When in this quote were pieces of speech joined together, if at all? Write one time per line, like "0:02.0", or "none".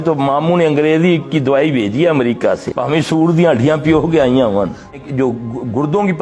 0:02.7
0:05.1